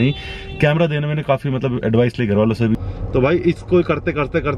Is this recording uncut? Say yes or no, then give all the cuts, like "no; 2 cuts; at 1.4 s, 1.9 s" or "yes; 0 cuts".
no; 1 cut; at 2.7 s